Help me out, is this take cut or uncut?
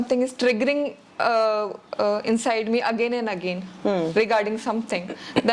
uncut